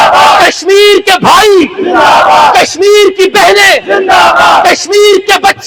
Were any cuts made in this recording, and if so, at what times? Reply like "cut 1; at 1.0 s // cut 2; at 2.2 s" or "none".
none